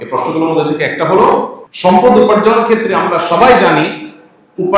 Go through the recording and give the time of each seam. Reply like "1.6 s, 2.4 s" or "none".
1.6 s